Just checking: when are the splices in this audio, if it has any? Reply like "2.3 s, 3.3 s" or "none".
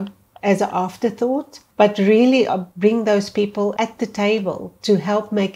1.6 s, 2.6 s, 3.7 s